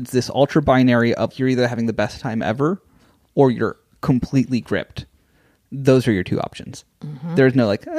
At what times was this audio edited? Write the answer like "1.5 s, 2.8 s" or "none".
1.3 s

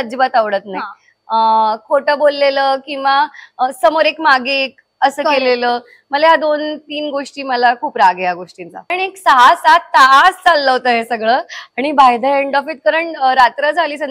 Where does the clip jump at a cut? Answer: 8.9 s

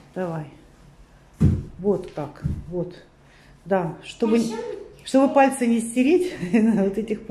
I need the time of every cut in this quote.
none

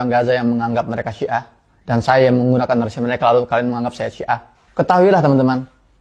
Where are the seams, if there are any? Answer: none

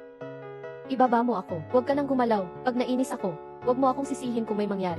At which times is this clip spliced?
none

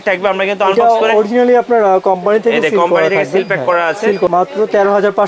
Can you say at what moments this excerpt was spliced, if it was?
4.3 s

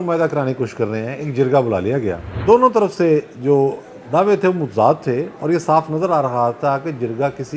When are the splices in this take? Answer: 2.2 s

